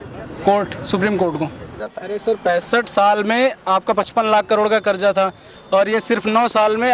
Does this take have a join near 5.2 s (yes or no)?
no